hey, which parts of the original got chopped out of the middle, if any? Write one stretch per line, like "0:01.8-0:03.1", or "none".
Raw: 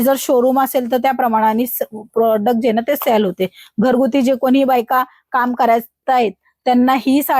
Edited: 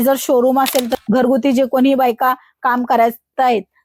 0:00.9-0:03.6